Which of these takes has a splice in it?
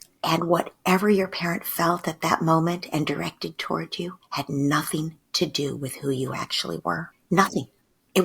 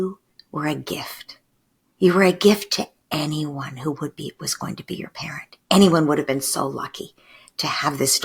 first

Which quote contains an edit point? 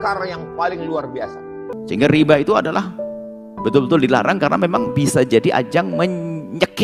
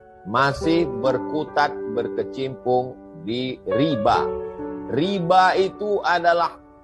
first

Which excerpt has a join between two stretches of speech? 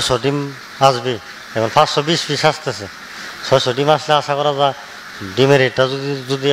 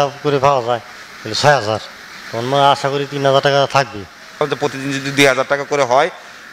second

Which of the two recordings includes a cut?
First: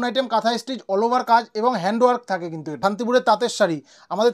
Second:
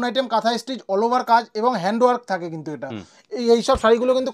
first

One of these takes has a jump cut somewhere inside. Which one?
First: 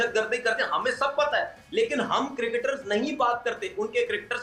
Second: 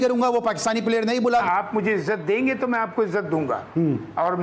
second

